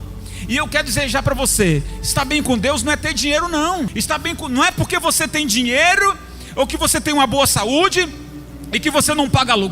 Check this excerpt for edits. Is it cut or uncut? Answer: cut